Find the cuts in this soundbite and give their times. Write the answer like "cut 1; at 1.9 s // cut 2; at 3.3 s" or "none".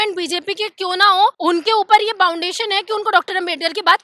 cut 1; at 1.4 s